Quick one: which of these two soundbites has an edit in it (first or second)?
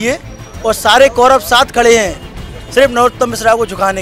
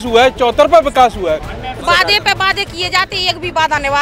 second